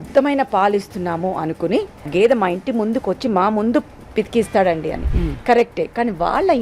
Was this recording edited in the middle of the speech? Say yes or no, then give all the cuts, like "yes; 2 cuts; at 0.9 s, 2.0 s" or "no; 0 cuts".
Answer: yes; 1 cut; at 2.1 s